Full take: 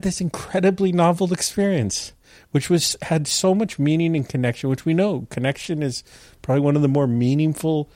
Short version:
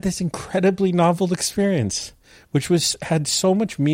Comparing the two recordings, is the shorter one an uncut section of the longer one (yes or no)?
yes